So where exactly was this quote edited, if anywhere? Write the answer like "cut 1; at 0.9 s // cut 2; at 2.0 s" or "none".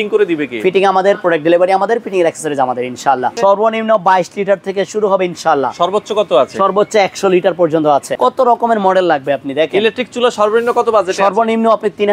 cut 1; at 3.3 s // cut 2; at 8.1 s